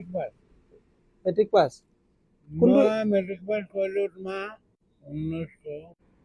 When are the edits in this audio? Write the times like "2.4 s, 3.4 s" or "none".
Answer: none